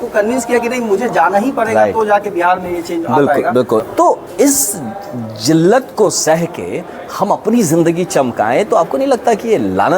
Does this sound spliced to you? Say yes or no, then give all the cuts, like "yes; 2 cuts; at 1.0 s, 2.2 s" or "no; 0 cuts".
yes; 1 cut; at 3.8 s